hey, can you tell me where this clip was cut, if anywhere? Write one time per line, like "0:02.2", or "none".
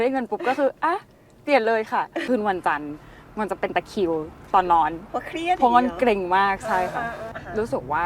0:02.2
0:07.3